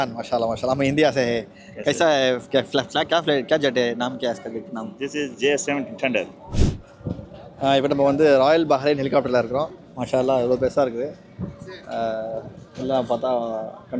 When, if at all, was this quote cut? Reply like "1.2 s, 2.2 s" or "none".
6.4 s